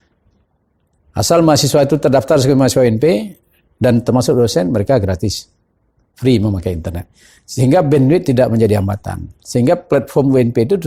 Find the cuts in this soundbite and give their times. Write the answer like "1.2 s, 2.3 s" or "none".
none